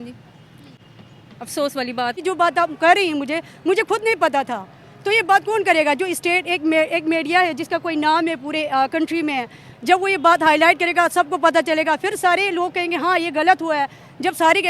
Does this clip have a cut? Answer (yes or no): yes